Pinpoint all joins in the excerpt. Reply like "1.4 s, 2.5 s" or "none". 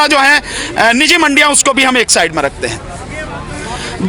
none